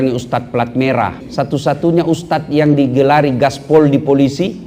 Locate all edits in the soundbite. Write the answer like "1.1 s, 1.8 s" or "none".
1.2 s